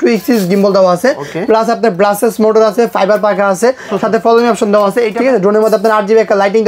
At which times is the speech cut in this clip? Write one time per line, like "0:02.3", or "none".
0:05.1